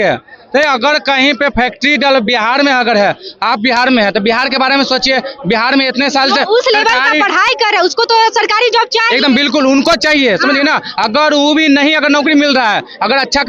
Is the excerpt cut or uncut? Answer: uncut